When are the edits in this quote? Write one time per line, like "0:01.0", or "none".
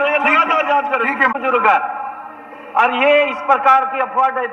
0:01.3

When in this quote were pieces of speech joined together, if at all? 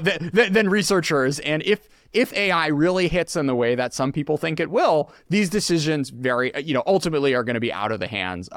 none

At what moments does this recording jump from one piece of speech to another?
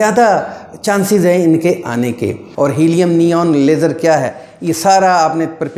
0:02.4

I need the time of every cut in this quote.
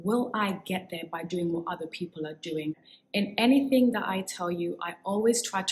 0:02.9

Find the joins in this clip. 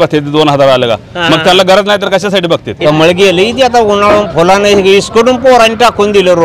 0:02.7

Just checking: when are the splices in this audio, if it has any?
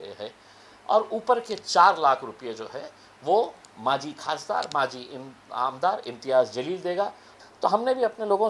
0:07.3

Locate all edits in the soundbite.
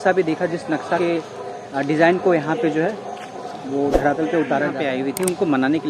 0:04.8

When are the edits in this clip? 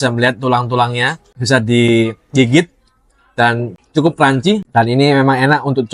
0:01.3
0:03.7
0:04.6

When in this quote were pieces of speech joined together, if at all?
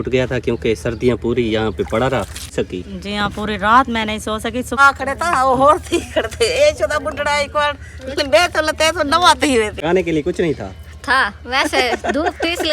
0:02.5
0:04.8
0:09.8

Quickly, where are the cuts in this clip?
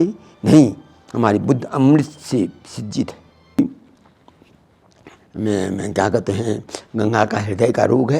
0:03.6

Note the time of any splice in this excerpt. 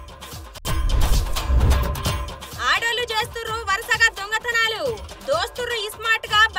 none

